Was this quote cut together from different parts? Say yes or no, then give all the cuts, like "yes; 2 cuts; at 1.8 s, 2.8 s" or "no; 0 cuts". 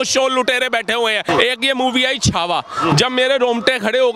yes; 1 cut; at 1.2 s